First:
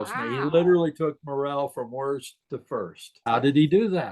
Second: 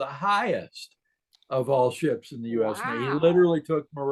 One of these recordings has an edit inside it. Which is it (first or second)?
first